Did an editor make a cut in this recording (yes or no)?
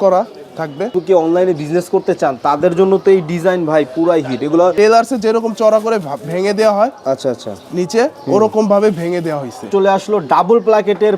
yes